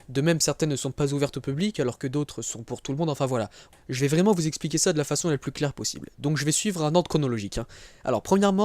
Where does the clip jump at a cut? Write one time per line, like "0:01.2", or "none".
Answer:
0:01.3